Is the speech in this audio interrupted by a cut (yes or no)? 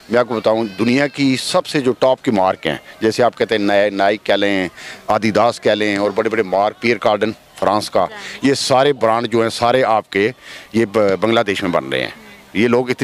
no